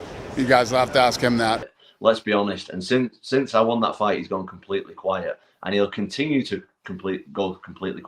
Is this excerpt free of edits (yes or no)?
no